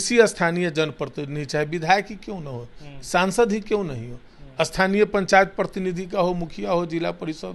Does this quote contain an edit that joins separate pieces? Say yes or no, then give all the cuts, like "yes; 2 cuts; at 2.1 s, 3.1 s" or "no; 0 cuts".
no; 0 cuts